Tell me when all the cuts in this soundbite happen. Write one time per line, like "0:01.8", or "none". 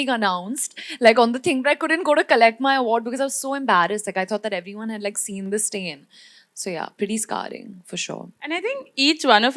none